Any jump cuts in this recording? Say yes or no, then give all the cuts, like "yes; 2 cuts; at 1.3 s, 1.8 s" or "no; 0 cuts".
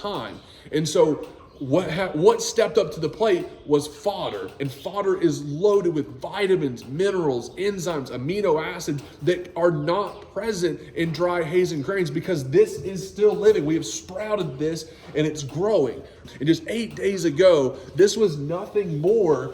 yes; 2 cuts; at 4.5 s, 16.2 s